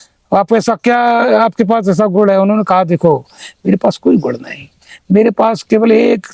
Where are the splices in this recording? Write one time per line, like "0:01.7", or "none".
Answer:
none

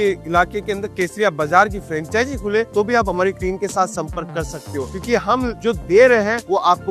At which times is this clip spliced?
none

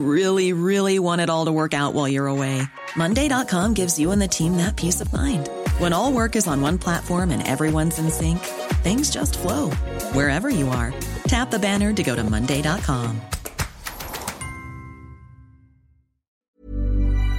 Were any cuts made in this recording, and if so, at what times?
0:16.4

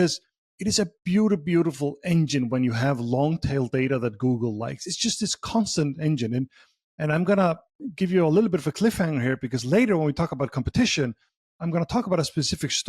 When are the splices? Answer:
none

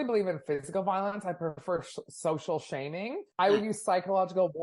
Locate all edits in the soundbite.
0:03.2

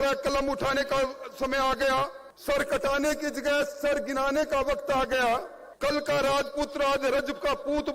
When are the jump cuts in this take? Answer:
0:02.3
0:05.6

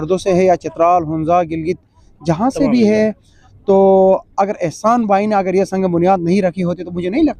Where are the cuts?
none

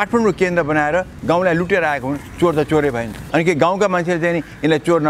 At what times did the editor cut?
0:03.1

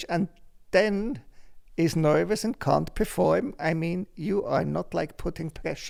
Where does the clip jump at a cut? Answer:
none

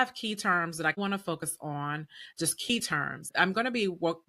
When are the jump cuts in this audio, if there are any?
0:01.0
0:03.2

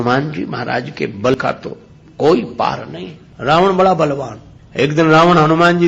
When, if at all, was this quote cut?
0:01.4

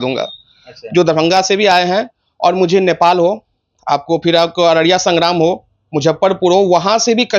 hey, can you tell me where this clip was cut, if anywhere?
none

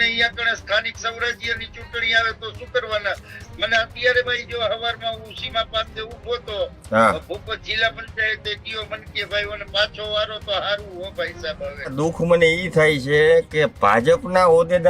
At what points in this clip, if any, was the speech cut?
0:11.9

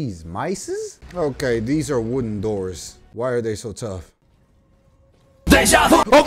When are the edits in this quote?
0:01.0

